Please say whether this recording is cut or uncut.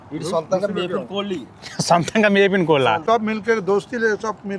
cut